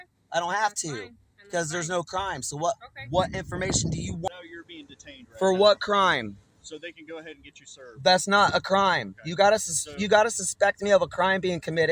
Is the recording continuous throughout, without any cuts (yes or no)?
no